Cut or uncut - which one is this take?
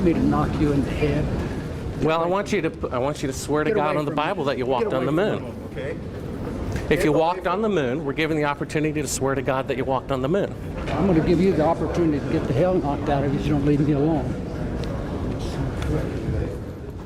uncut